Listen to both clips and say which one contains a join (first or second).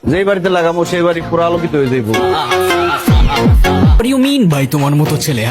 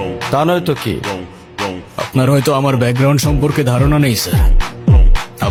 first